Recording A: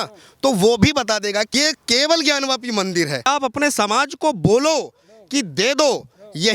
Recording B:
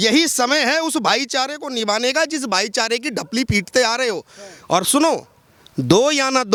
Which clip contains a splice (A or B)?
A